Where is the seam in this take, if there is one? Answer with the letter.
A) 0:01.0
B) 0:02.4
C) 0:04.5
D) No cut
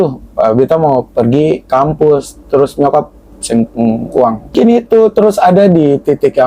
C